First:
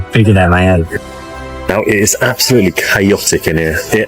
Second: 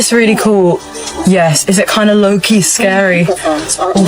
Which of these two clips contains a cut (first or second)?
first